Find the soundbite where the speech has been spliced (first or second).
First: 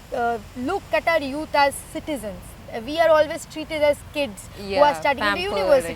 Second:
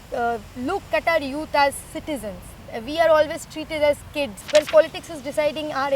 second